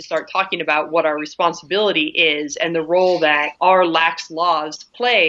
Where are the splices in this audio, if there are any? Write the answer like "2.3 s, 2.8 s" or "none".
none